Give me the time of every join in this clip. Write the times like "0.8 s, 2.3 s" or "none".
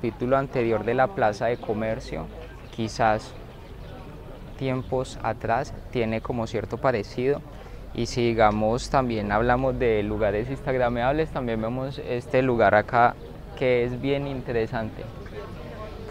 none